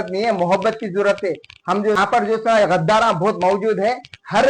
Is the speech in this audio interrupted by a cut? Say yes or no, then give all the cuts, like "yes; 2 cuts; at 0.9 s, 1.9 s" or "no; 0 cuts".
yes; 1 cut; at 2.0 s